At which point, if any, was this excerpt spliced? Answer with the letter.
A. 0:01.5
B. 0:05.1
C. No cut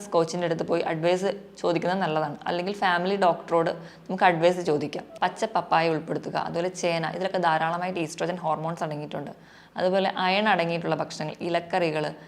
B